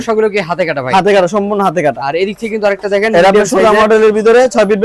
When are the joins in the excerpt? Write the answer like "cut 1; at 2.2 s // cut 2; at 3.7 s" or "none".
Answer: none